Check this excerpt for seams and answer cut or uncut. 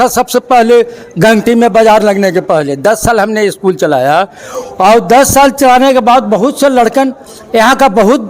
uncut